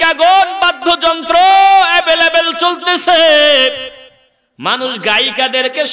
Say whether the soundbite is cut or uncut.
uncut